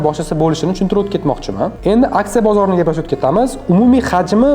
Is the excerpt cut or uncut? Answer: cut